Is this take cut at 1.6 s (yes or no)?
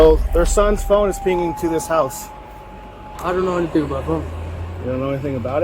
no